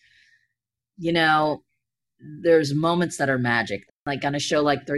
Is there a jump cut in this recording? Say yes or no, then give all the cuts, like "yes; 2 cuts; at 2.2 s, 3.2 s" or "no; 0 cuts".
yes; 1 cut; at 3.9 s